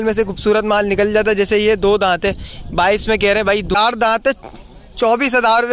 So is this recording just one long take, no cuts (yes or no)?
no